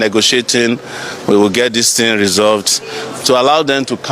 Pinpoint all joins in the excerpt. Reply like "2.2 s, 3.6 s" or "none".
none

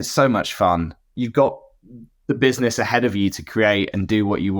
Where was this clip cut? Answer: 1.0 s

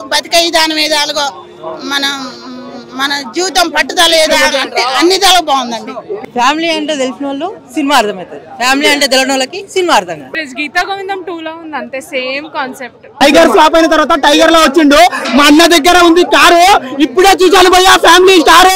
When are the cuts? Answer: 6.1 s, 10.3 s, 13.2 s

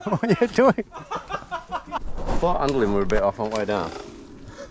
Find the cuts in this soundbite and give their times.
2.0 s

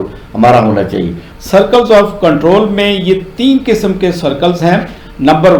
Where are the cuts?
1.2 s

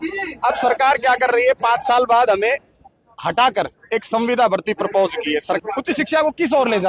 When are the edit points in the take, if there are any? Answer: 5.6 s

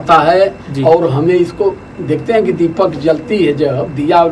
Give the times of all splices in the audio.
none

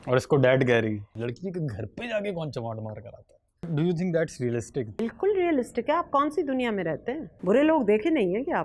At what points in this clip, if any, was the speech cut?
1.0 s, 3.7 s, 5.0 s, 7.3 s

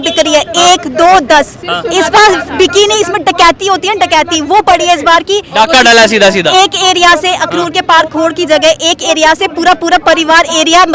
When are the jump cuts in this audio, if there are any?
none

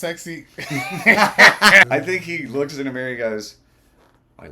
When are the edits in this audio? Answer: 1.8 s

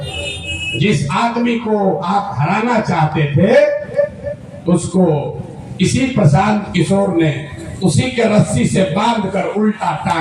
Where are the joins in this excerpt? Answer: none

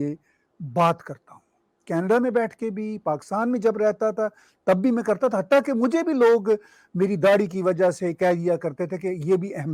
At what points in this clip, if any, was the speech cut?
none

